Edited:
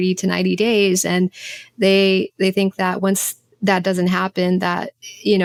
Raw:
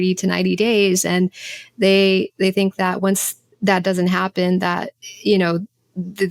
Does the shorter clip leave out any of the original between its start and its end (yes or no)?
no